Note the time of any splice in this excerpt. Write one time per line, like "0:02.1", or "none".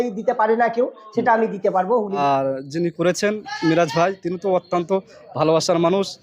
0:02.2

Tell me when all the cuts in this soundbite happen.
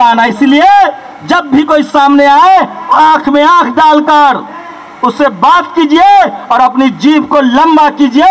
none

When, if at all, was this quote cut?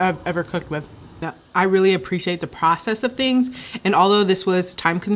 0:01.3

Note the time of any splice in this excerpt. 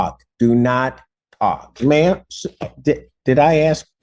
0:01.7

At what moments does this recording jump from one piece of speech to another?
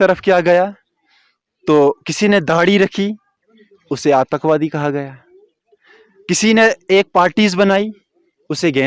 none

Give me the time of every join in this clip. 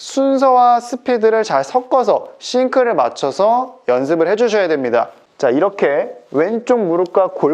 0:05.2

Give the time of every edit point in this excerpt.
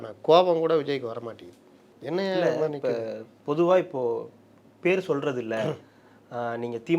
none

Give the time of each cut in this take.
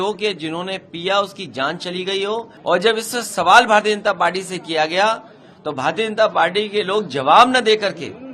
0:02.5

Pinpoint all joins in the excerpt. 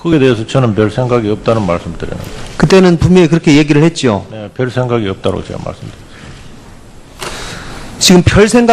none

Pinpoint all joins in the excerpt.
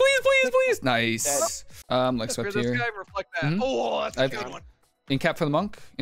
0:01.7

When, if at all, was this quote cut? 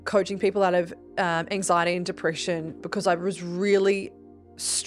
none

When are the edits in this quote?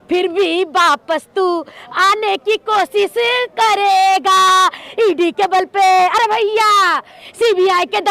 none

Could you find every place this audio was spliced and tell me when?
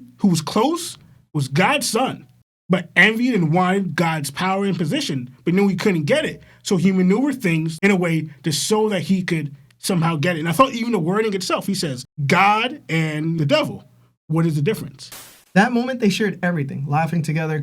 0:13.4
0:15.1

